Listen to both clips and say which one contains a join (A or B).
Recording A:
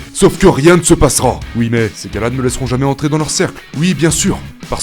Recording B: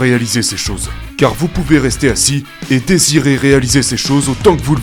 A